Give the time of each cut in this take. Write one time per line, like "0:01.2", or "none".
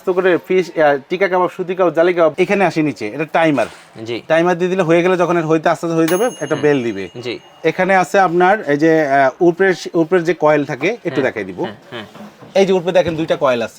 0:02.3